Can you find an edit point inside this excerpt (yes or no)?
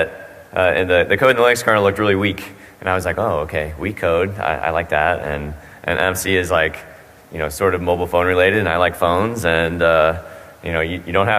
yes